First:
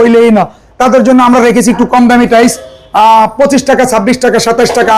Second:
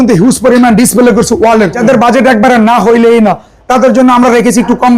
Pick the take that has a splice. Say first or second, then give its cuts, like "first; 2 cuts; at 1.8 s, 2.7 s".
second; 1 cut; at 1.8 s